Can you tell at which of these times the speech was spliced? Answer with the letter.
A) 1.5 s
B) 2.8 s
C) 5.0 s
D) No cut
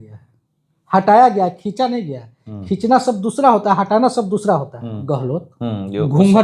C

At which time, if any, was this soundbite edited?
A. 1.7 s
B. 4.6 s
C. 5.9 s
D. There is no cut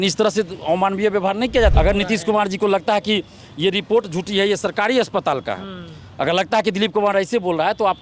A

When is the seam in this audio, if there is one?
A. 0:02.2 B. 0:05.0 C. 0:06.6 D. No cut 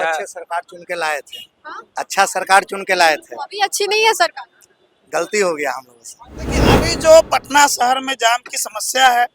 C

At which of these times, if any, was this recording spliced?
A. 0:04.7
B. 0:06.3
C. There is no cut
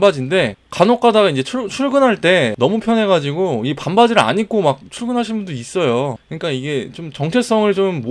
B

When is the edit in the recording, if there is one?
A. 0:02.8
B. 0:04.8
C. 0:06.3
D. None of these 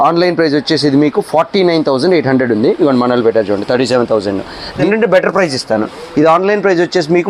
B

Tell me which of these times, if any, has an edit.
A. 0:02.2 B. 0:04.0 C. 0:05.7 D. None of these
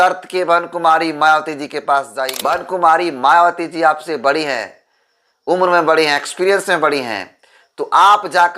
A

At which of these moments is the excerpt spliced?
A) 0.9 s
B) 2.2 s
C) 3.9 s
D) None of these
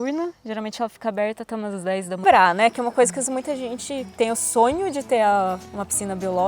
B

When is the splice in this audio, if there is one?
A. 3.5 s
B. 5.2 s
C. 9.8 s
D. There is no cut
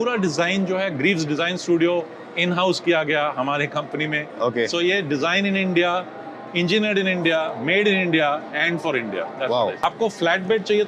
C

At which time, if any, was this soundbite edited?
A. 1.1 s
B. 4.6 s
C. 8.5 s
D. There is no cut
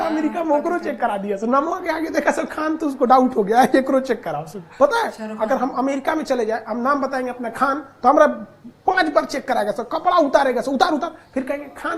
B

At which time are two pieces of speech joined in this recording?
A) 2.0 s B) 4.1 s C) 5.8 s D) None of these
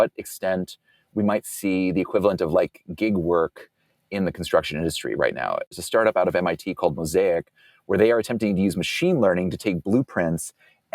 C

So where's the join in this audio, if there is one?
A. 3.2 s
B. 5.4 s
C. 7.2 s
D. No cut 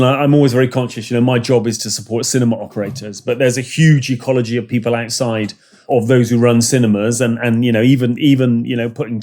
D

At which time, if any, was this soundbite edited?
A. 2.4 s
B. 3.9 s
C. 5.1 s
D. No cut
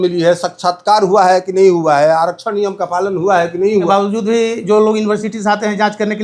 B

